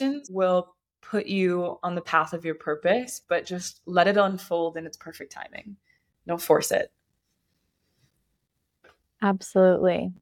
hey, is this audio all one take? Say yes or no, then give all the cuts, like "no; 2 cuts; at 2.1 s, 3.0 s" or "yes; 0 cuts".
yes; 0 cuts